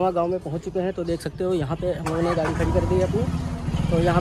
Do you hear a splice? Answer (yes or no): no